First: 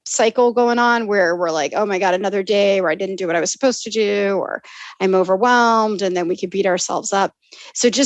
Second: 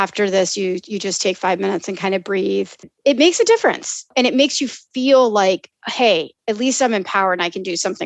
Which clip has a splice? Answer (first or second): second